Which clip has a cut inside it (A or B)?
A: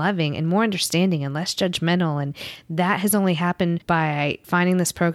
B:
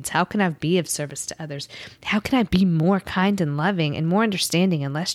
A